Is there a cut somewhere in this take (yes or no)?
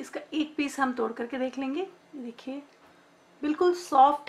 no